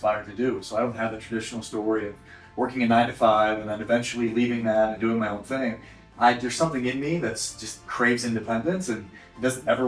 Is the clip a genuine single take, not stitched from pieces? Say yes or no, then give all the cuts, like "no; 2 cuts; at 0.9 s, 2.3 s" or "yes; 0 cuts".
yes; 0 cuts